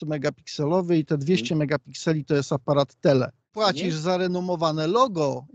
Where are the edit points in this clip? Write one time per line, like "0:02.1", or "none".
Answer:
0:03.4